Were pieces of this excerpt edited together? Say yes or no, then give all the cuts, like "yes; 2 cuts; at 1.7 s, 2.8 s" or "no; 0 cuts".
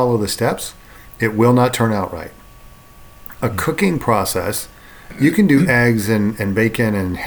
yes; 1 cut; at 5.1 s